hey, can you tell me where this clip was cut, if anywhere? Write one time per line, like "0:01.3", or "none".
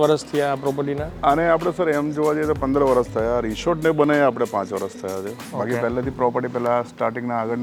none